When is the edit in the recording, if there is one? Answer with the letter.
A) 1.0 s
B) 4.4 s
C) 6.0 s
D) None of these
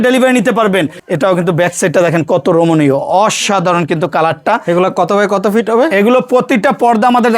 A